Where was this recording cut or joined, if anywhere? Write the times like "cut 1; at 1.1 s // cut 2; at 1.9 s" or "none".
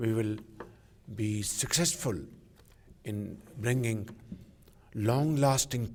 none